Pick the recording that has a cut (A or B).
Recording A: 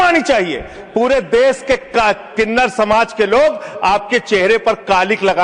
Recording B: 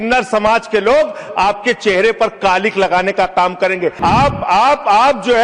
B